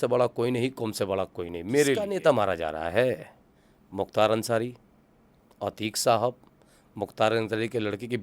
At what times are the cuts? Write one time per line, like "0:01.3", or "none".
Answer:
0:02.0

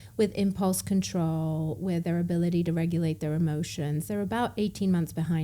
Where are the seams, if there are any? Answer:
none

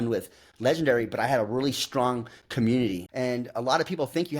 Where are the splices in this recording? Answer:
0:03.0

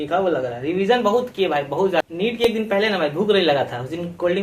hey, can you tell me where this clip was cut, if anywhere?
0:02.4

